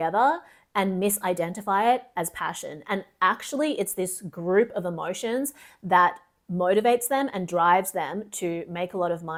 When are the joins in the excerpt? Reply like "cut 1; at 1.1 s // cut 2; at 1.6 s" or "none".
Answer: none